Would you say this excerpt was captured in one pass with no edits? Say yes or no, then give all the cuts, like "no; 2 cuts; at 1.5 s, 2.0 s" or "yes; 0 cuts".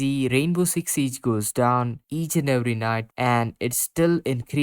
no; 1 cut; at 3.1 s